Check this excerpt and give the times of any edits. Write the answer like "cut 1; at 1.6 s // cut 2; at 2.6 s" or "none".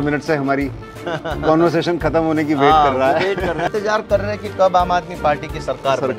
cut 1; at 3.7 s